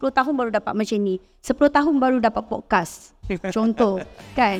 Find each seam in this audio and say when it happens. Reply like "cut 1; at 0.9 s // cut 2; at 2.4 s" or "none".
none